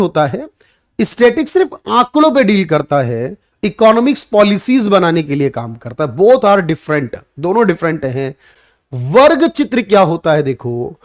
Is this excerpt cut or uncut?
cut